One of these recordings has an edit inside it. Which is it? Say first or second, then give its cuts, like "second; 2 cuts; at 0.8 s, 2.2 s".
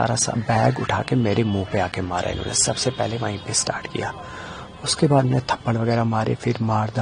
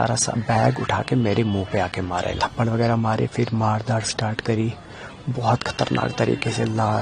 second; 1 cut; at 2.4 s